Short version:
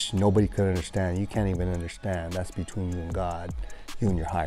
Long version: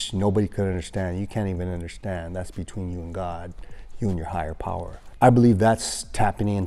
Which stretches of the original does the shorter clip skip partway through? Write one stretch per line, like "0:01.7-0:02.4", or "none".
none